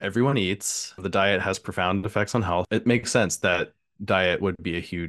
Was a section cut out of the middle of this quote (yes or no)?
yes